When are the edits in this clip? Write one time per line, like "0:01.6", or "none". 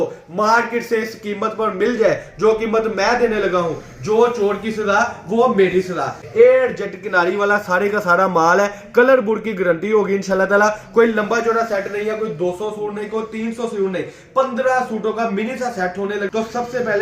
0:06.2
0:16.3